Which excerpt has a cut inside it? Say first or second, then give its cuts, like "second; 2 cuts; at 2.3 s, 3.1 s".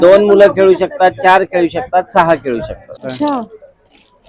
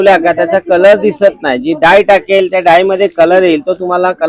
first; 1 cut; at 3.0 s